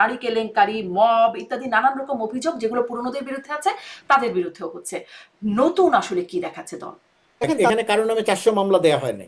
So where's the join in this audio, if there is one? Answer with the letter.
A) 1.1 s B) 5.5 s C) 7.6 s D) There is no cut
C